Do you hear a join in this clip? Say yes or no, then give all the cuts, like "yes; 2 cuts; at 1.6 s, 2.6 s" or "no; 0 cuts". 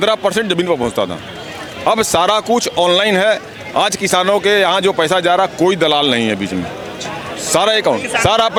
no; 0 cuts